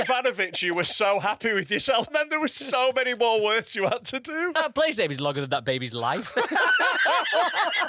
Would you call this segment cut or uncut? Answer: cut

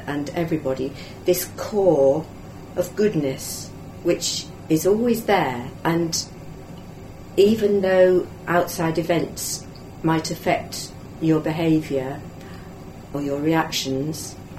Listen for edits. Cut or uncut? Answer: cut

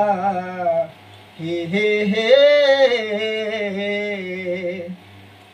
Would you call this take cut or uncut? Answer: uncut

